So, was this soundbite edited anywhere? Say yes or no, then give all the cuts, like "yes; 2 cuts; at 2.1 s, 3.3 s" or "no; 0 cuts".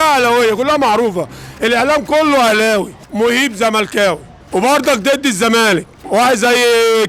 yes; 3 cuts; at 3.0 s, 4.3 s, 5.9 s